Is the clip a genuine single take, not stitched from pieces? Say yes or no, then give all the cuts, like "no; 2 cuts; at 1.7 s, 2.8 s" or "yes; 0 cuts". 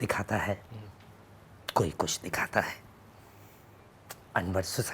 yes; 0 cuts